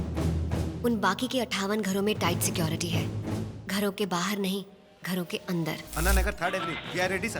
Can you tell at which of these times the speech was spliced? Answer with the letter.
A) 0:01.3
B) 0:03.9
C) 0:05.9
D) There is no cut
C